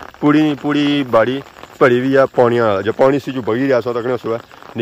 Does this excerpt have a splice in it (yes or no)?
no